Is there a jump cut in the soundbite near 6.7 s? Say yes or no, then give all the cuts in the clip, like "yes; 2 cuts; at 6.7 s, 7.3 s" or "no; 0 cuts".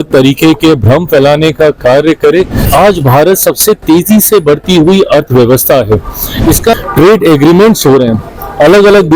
yes; 2 cuts; at 2.6 s, 6.7 s